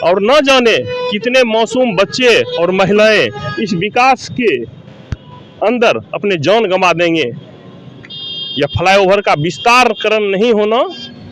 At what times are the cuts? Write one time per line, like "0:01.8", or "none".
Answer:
none